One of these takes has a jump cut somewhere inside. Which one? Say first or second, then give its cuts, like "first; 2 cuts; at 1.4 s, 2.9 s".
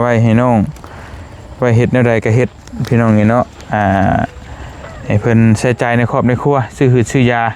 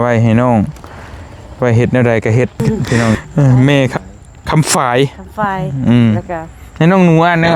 second; 2 cuts; at 3.1 s, 3.9 s